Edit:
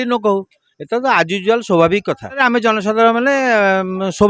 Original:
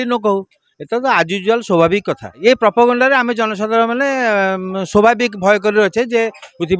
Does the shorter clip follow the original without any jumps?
no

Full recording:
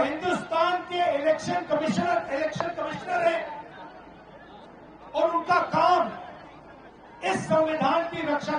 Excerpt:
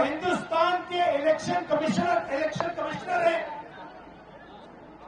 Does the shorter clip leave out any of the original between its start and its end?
no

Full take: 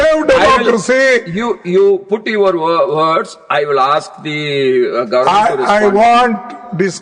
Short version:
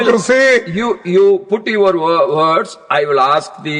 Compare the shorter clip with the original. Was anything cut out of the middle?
no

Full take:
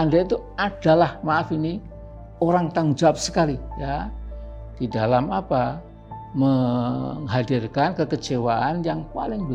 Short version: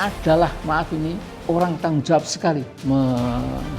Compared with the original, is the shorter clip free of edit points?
no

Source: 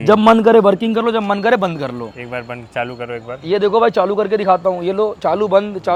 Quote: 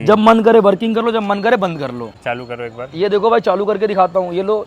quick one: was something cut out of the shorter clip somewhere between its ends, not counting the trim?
yes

